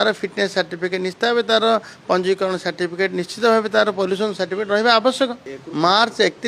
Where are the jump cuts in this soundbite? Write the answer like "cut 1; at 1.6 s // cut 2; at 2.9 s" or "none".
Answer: cut 1; at 5.4 s

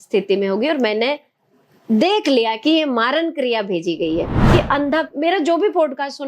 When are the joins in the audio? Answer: cut 1; at 4.4 s

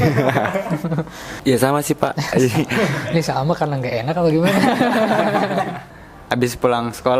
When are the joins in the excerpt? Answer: cut 1; at 1.2 s // cut 2; at 5.9 s

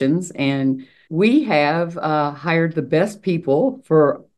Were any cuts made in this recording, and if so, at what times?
cut 1; at 1.0 s

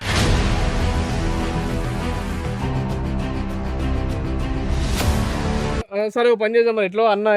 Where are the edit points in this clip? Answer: cut 1; at 5.9 s

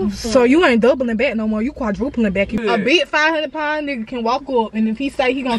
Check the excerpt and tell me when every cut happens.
cut 1; at 2.5 s

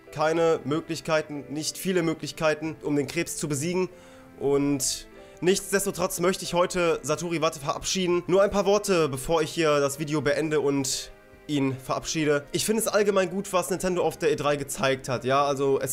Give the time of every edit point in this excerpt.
none

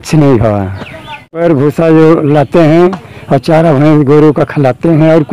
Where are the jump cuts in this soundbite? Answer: cut 1; at 1.4 s

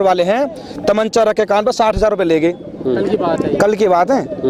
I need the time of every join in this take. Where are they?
none

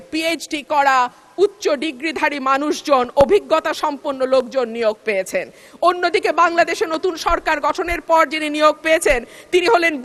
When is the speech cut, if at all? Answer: none

